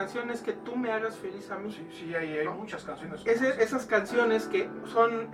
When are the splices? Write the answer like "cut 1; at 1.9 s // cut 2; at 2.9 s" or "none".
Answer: none